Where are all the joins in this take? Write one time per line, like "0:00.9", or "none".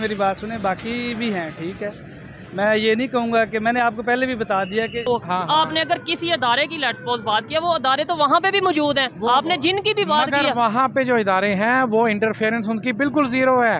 0:05.0